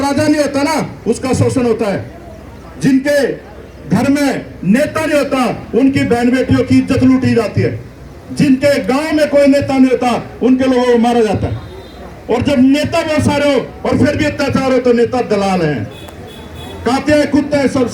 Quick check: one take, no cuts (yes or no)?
yes